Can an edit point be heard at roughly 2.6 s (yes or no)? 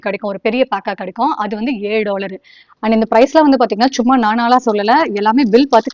yes